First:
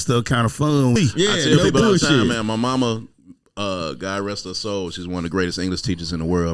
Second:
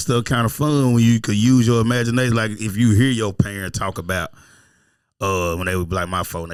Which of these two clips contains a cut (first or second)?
first